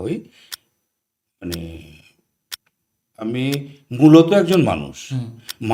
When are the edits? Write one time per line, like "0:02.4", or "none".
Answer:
none